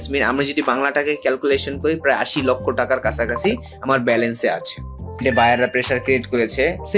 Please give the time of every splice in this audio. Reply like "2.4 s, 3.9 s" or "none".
5.2 s